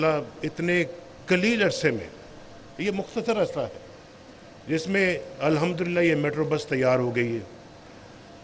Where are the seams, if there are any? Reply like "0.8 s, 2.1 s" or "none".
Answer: none